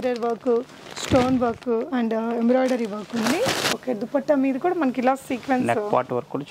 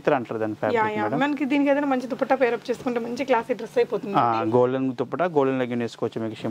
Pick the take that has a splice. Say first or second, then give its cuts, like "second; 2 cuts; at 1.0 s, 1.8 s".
first; 1 cut; at 3.8 s